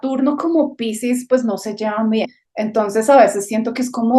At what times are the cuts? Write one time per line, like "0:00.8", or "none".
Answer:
0:02.4